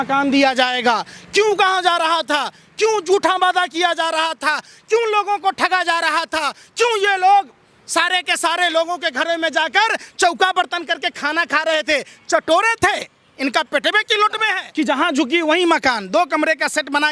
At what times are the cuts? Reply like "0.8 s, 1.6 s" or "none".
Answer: 14.6 s